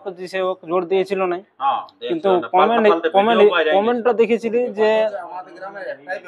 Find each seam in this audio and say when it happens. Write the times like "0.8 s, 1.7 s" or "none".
none